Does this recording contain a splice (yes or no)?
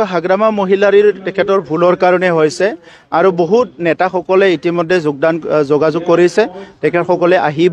no